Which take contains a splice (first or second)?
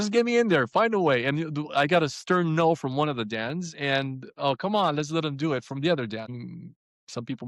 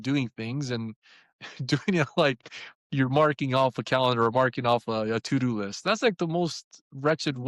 first